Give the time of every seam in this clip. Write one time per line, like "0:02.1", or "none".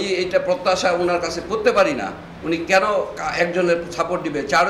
none